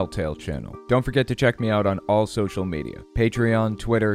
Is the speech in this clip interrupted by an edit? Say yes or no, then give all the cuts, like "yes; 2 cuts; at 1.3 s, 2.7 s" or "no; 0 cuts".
no; 0 cuts